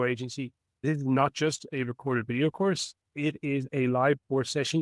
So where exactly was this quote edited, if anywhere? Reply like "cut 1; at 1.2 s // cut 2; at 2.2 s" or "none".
cut 1; at 0.8 s // cut 2; at 3.7 s